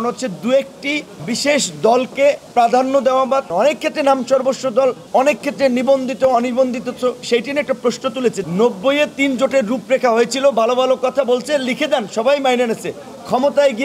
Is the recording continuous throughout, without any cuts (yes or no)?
no